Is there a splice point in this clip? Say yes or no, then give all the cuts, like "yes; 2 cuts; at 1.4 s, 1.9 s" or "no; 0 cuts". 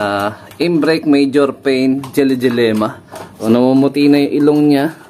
yes; 1 cut; at 3.4 s